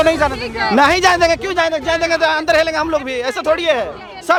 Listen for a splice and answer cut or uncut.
uncut